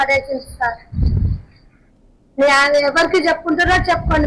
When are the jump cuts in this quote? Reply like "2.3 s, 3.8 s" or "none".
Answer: none